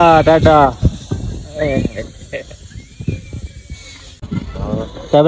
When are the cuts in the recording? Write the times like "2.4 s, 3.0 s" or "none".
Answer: 4.4 s